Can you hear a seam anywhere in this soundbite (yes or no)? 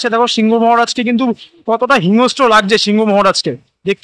no